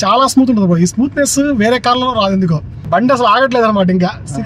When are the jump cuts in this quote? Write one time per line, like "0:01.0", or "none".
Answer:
0:02.7